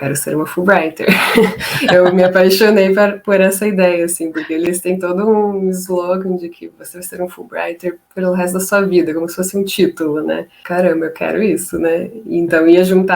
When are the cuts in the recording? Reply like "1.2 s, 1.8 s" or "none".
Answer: 4.7 s, 10.6 s